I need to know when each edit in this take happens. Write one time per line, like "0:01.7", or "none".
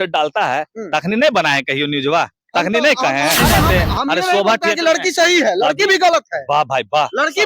0:03.4